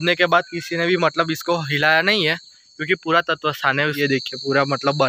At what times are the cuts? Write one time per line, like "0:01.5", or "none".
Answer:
0:04.0